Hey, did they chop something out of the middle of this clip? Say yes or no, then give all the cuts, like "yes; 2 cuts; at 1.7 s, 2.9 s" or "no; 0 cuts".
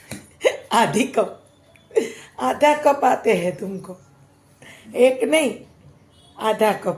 no; 0 cuts